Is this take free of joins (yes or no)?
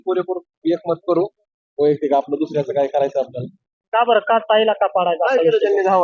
yes